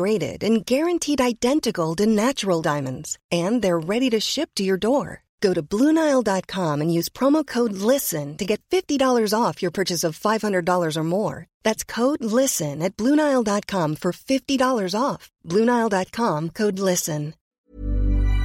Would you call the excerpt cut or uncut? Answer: cut